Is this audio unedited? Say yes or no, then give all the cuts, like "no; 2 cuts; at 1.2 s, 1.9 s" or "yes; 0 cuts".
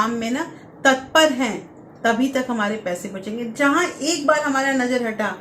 yes; 0 cuts